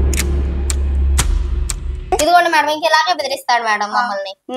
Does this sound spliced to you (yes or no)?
yes